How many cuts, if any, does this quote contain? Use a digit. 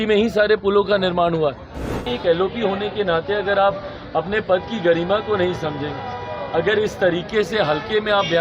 1